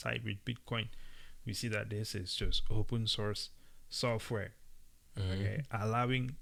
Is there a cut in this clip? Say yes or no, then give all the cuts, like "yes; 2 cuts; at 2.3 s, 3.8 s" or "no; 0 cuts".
no; 0 cuts